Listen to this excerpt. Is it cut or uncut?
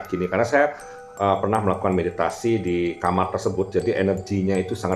uncut